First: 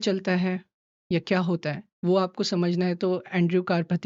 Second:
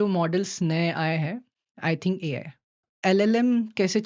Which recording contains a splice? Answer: second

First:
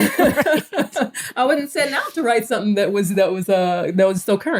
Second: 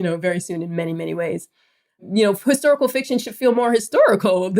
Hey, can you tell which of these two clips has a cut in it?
second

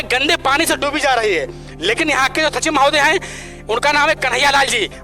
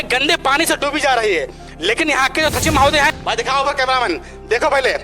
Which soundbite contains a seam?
second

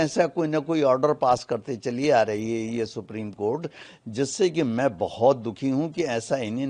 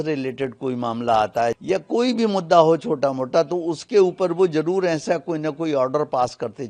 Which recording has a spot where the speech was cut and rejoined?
second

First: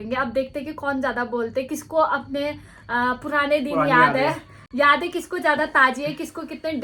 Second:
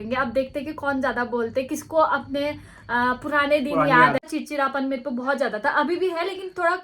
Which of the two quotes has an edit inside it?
second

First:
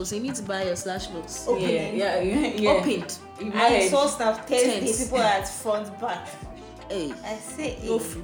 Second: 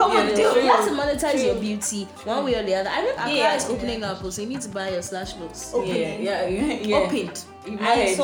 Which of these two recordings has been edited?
second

